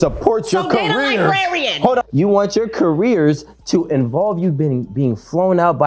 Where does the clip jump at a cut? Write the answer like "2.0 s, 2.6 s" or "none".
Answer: 2.0 s